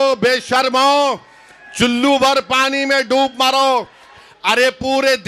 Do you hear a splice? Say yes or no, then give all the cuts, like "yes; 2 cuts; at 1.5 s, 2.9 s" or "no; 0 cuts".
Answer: yes; 1 cut; at 4.2 s